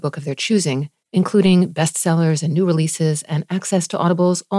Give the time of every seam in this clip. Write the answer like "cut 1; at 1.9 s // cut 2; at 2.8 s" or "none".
none